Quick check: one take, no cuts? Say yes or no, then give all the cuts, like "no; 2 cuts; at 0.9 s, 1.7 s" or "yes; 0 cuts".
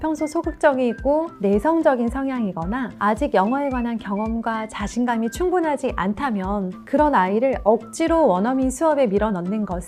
yes; 0 cuts